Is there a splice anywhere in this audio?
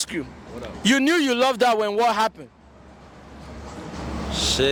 no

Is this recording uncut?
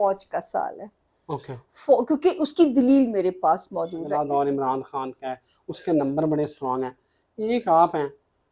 no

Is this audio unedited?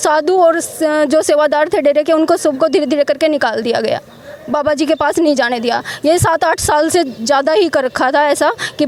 yes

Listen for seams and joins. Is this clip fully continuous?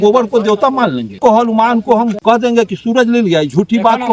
no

